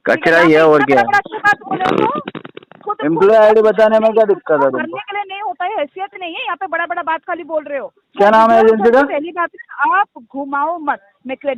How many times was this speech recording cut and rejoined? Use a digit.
1